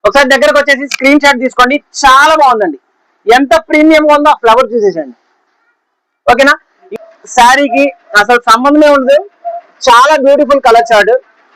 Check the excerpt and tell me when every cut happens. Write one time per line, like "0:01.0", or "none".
0:06.8